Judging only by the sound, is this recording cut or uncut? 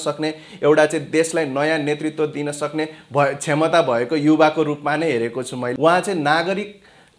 cut